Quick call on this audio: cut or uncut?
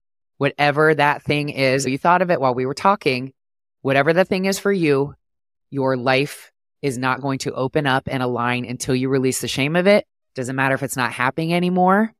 cut